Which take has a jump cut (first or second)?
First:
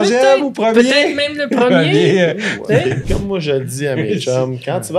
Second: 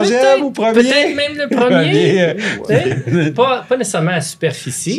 first